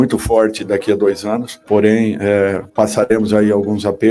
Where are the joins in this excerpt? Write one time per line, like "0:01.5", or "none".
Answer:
0:01.5
0:02.6

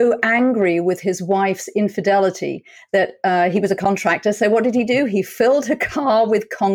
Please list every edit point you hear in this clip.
none

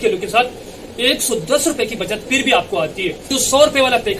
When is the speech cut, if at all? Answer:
0:03.3

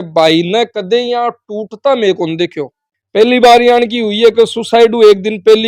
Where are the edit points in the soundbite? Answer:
none

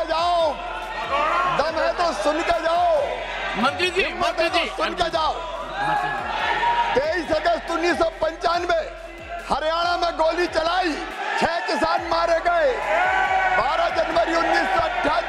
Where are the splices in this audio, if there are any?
none

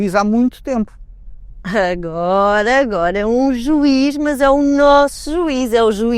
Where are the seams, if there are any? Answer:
none

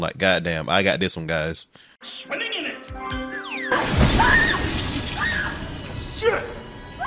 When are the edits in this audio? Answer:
none

